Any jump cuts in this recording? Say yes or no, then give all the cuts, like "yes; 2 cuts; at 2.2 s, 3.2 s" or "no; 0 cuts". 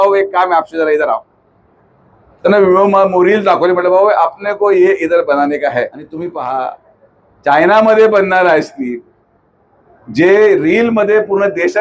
yes; 1 cut; at 6.1 s